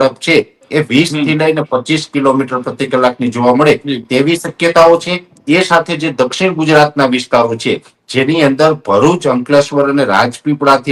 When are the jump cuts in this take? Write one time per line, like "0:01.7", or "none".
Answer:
none